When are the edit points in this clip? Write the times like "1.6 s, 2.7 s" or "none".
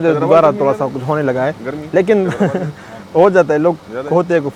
none

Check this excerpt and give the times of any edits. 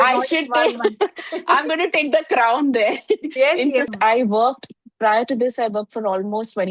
3.9 s

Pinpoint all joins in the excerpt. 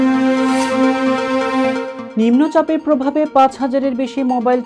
none

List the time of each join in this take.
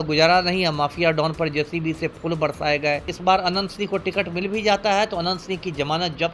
3.1 s

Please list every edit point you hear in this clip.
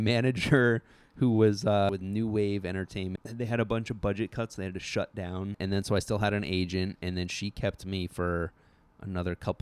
1.9 s, 3.2 s, 5.6 s

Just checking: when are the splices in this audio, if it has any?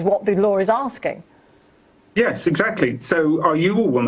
none

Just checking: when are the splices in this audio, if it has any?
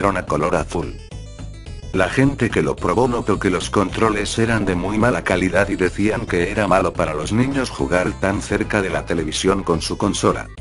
1.1 s

